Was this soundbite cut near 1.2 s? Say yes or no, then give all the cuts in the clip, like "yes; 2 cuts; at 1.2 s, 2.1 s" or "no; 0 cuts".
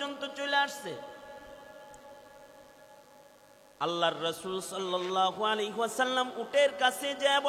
no; 1 cut; at 3.0 s